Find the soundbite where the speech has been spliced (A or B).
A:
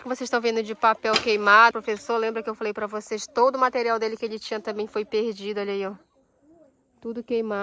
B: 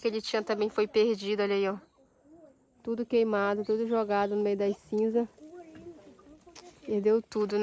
A